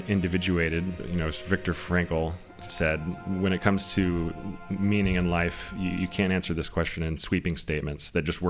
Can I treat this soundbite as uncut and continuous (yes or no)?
no